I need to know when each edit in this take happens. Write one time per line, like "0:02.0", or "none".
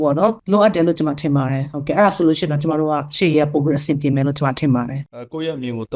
0:05.0